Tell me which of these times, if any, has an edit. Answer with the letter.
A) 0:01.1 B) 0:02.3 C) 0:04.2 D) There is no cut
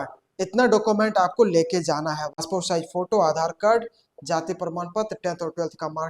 B